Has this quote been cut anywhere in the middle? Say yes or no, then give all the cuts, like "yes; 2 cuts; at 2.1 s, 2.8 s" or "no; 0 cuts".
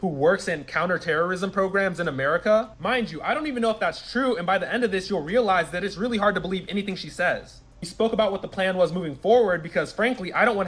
no; 0 cuts